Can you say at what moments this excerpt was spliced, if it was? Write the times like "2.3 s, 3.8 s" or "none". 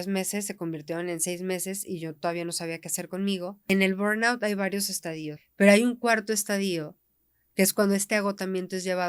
3.7 s, 5.3 s